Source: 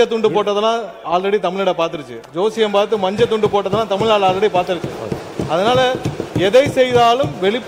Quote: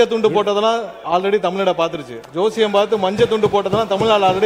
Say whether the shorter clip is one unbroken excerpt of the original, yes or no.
yes